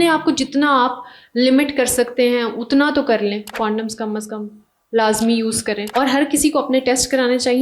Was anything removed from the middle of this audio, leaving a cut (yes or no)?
yes